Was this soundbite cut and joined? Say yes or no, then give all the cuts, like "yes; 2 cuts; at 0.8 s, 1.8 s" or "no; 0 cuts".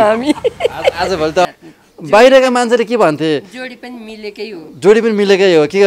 yes; 1 cut; at 1.5 s